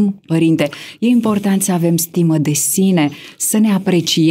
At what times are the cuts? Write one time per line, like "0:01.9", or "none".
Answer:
none